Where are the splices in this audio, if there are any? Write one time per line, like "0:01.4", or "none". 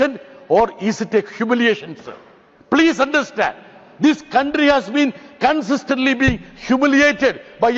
none